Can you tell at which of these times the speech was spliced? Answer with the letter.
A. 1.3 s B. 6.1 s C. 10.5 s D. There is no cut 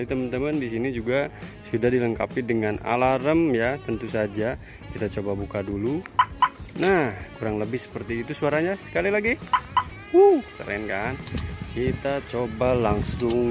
D